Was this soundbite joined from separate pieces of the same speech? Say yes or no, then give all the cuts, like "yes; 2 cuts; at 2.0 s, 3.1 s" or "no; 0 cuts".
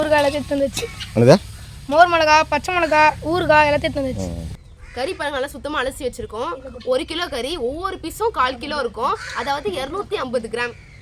yes; 1 cut; at 4.5 s